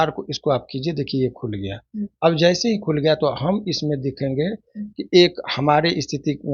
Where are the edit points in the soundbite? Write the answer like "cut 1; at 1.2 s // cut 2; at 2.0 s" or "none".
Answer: none